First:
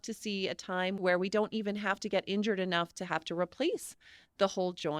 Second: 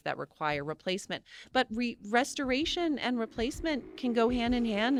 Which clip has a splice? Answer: first; 1 cut; at 1.0 s

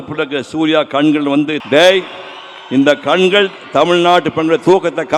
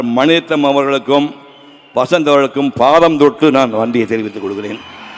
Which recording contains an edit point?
first; 1 cut; at 1.6 s

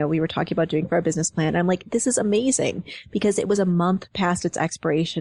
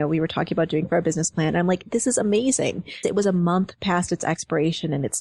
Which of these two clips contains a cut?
second; 1 cut; at 3.0 s

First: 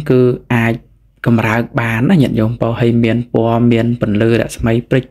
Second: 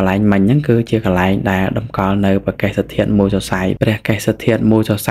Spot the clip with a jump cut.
second; 1 cut; at 3.8 s

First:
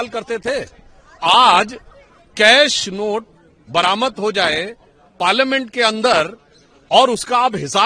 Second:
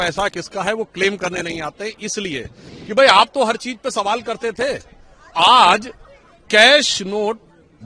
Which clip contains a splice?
second; 1 cut; at 2.6 s

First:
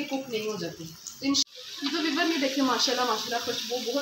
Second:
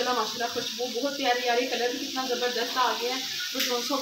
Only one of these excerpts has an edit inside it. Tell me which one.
first; 1 cut; at 1.4 s

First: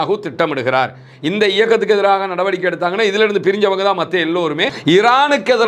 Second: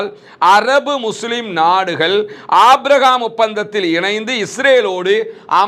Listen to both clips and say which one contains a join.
first; 1 cut; at 4.7 s

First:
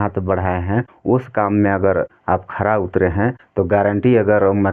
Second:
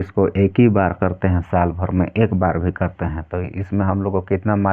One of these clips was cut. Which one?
first; 3 cuts; at 0.9 s, 2.2 s, 3.4 s

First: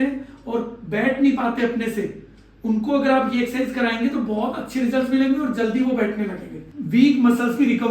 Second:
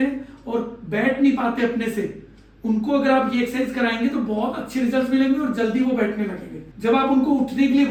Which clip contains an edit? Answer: first; 1 cut; at 6.7 s

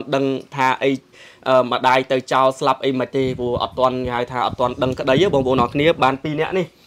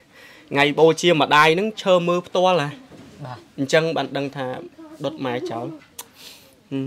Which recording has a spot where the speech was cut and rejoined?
second; 1 cut; at 5.8 s

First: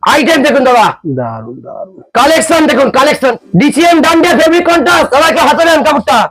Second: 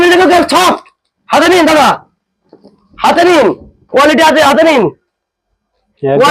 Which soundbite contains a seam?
first; 1 cut; at 3.4 s

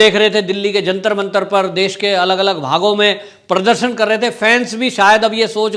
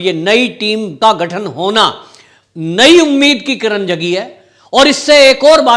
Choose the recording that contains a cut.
second; 1 cut; at 0.9 s

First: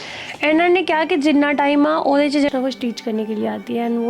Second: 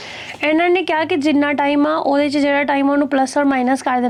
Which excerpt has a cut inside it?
first; 1 cut; at 2.5 s

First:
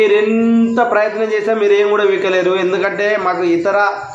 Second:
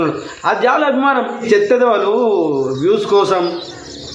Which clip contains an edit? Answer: second; 1 cut; at 1.4 s

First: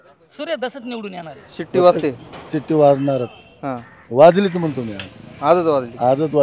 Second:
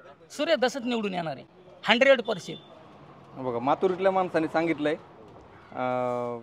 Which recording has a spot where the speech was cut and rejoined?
first; 1 cut; at 1.4 s

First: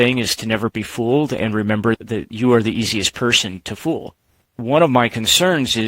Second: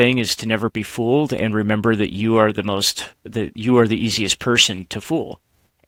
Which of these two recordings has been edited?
first; 2 cuts; at 2.0 s, 4.5 s

